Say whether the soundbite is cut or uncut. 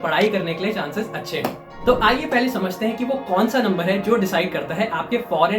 cut